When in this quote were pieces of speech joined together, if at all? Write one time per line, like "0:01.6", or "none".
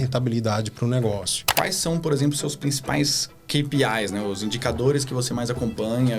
0:01.4